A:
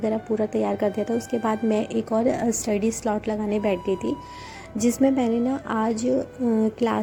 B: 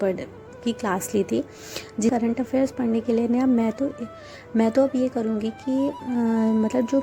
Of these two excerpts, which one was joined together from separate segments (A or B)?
B